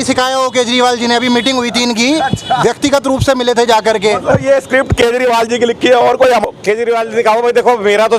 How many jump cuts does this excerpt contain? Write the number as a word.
one